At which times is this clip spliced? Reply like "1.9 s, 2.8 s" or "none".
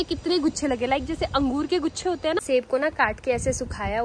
2.4 s